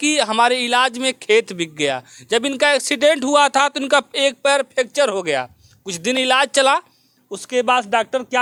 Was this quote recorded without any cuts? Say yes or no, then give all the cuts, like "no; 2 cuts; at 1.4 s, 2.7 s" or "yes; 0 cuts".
yes; 0 cuts